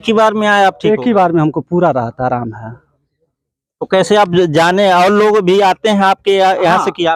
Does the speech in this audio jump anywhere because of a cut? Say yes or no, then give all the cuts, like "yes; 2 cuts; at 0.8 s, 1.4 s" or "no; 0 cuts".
no; 0 cuts